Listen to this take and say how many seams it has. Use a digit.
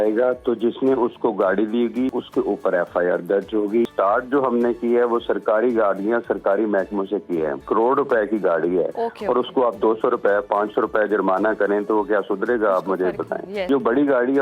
4